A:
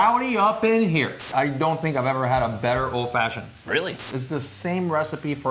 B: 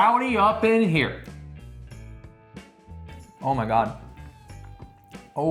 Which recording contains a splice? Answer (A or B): A